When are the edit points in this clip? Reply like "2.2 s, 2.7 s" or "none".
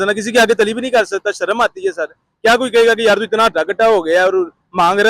none